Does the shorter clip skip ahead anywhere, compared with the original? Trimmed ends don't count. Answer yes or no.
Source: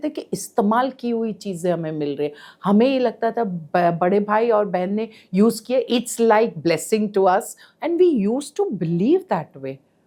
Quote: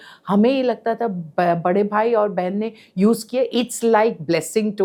no